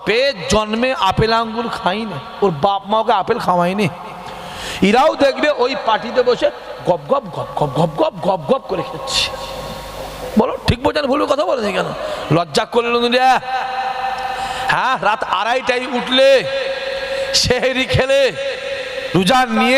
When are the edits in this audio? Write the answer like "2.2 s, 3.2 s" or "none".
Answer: none